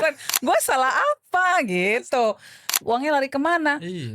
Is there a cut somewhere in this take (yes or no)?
yes